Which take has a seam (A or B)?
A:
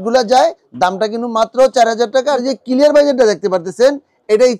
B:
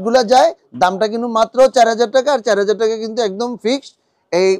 A